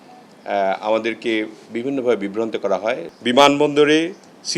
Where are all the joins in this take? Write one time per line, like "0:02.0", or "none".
0:03.1